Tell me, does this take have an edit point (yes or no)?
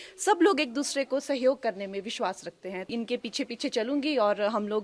yes